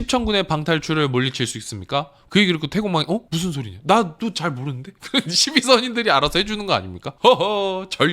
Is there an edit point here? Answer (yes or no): yes